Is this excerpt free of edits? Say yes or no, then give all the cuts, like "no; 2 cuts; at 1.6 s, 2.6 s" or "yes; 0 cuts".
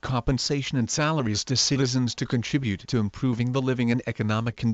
yes; 0 cuts